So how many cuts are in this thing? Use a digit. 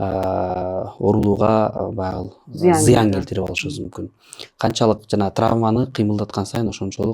0